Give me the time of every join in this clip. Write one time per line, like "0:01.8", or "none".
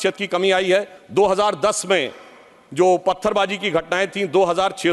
0:01.0